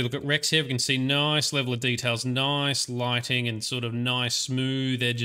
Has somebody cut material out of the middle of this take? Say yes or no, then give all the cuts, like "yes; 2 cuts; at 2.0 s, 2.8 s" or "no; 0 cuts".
no; 0 cuts